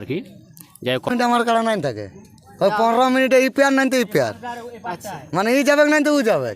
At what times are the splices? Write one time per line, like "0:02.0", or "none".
0:01.1